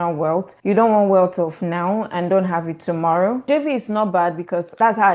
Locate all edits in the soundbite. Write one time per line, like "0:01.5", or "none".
0:03.5